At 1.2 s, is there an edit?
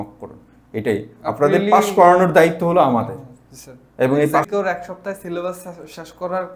no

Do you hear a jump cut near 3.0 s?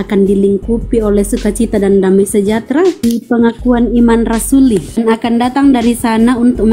yes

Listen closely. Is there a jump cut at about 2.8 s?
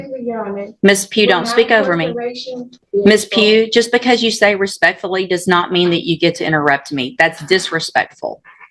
yes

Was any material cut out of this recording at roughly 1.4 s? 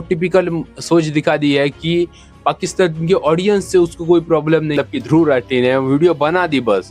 no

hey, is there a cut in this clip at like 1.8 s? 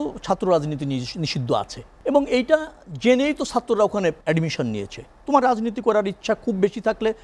yes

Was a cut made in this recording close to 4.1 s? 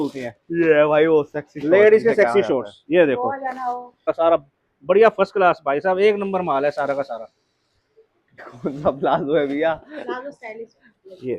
yes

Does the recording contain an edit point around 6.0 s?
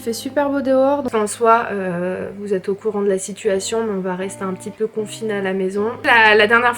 yes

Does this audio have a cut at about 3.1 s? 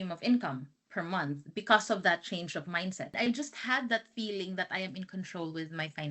yes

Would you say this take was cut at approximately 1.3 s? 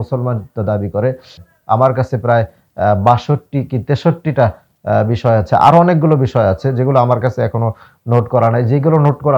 yes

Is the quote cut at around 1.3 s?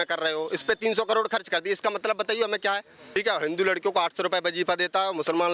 no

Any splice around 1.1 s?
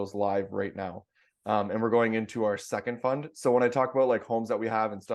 no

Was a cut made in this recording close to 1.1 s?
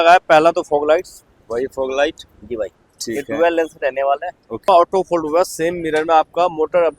no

